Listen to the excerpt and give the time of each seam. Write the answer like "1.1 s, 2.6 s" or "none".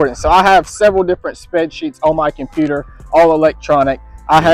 none